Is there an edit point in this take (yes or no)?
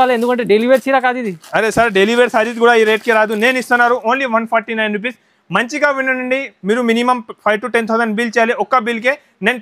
no